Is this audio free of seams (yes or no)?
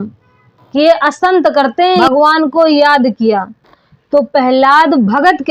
no